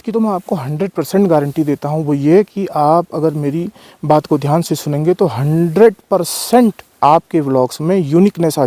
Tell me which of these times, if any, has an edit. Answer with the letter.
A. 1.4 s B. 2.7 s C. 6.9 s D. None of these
C